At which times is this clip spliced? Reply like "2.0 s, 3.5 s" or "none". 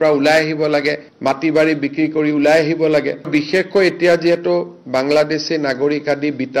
3.2 s